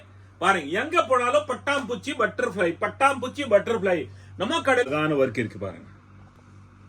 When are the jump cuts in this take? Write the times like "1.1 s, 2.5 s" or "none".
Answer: 4.9 s